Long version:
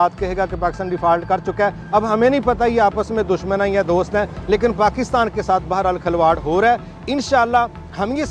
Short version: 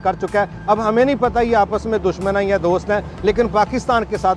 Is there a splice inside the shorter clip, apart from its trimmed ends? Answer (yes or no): no